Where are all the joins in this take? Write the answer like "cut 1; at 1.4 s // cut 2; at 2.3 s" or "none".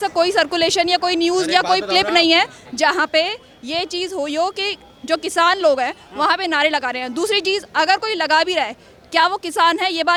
none

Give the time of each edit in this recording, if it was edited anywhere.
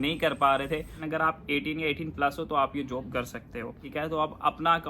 cut 1; at 1.0 s // cut 2; at 3.8 s

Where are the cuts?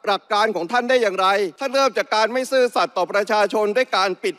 cut 1; at 1.6 s

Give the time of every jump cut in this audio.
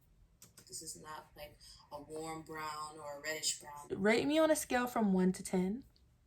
cut 1; at 3.9 s

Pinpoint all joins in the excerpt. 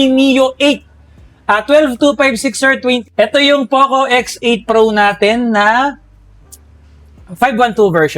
cut 1; at 3.1 s

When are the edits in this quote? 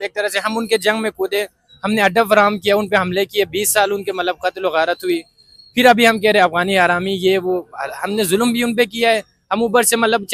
none

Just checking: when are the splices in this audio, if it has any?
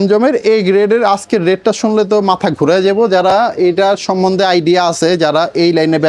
none

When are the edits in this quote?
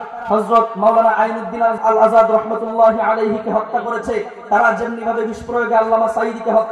cut 1; at 1.8 s

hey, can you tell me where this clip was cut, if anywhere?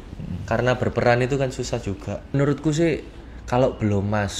cut 1; at 2.3 s

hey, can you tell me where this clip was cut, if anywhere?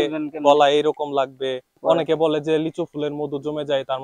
cut 1; at 1.7 s

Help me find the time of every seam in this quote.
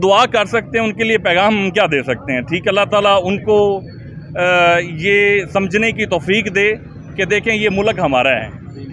none

